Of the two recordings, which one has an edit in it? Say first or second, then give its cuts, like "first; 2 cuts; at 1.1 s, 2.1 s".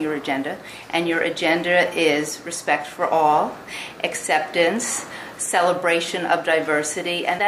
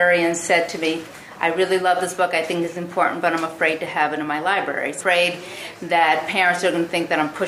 second; 1 cut; at 1.1 s